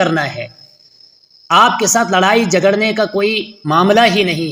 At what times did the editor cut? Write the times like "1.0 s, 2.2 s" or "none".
none